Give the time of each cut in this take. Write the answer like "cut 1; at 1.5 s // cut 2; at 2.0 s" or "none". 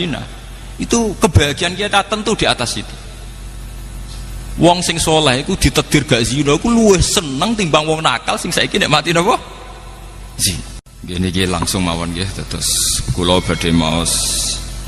cut 1; at 10.9 s

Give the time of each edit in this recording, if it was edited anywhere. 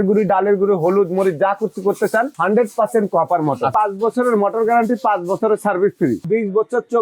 cut 1; at 2.3 s // cut 2; at 3.7 s // cut 3; at 6.2 s

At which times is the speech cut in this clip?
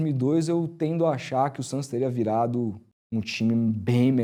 none

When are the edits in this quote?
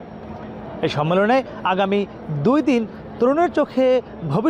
none

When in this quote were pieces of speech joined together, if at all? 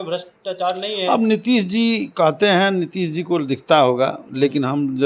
none

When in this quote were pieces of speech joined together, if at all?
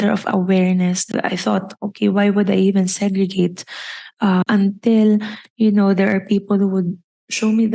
cut 1; at 1.0 s // cut 2; at 4.4 s

